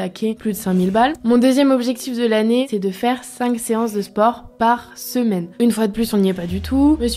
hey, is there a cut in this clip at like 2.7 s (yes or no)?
yes